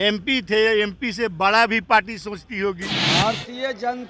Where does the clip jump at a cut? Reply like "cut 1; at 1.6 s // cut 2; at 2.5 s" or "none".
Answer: cut 1; at 2.9 s